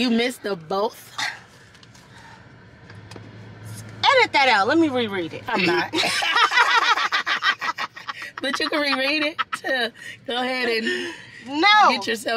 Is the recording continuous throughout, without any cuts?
yes; 0 cuts

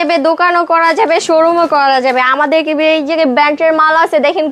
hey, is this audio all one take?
yes; 0 cuts

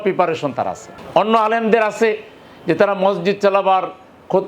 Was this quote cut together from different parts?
no; 0 cuts

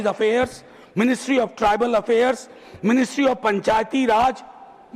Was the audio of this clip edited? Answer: no; 0 cuts

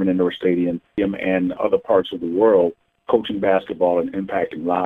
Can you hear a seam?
yes; 1 cut; at 1.2 s

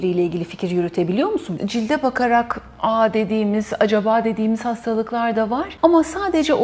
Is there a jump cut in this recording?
yes; 2 cuts; at 1.5 s, 5.7 s

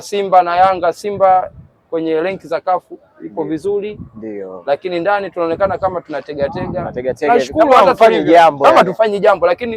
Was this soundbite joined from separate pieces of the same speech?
no; 0 cuts

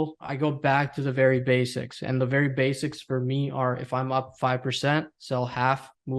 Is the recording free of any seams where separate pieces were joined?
yes; 0 cuts

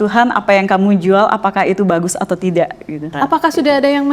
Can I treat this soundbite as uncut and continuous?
no; 1 cut; at 3.1 s

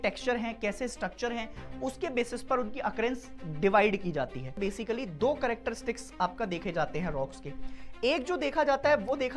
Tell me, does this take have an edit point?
yes; 1 cut; at 4.7 s

